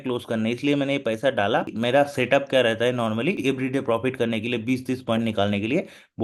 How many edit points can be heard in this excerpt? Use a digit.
2